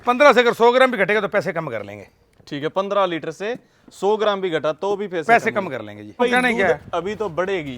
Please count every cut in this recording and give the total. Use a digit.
1